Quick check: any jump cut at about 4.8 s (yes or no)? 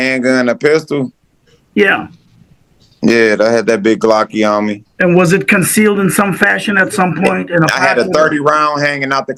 no